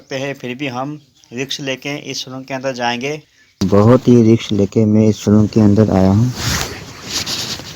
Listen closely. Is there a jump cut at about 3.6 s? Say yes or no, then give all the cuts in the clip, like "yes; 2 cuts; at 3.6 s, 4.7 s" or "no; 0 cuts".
yes; 1 cut; at 3.6 s